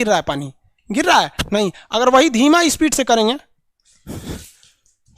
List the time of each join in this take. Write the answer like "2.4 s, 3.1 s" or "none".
none